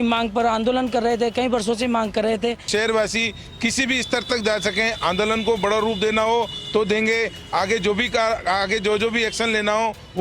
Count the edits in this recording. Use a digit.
1